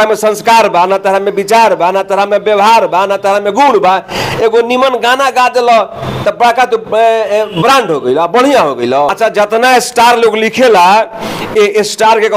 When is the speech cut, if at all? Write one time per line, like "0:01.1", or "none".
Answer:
none